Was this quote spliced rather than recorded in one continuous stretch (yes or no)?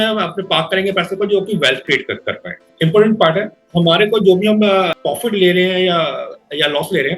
yes